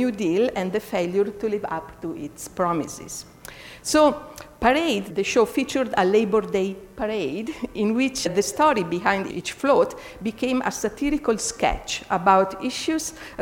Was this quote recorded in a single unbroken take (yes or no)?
yes